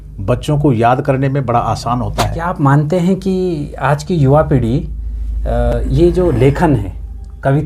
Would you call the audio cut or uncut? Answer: cut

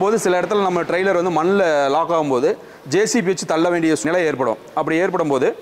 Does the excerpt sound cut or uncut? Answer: cut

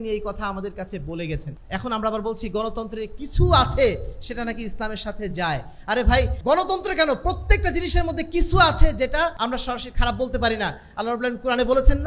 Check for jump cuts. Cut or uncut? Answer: cut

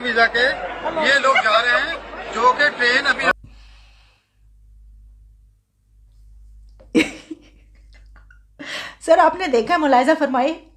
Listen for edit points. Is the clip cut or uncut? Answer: uncut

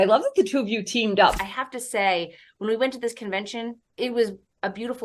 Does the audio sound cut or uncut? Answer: cut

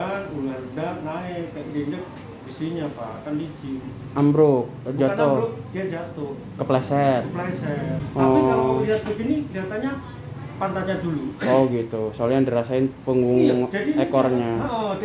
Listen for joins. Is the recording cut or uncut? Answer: cut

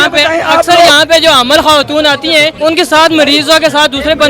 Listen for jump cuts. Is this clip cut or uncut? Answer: cut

